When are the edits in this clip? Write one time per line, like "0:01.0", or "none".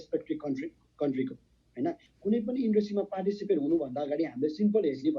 0:02.1